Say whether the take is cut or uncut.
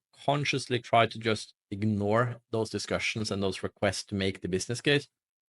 cut